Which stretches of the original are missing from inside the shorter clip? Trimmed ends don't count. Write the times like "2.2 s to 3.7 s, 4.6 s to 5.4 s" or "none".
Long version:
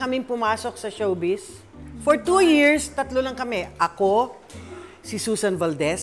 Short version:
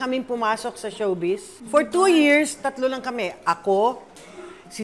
1.5 s to 1.9 s